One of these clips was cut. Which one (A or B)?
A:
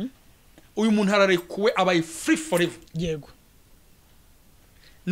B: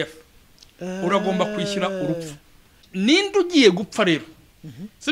B